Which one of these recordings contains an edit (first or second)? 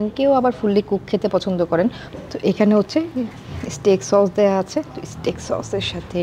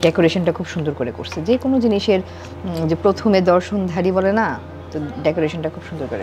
first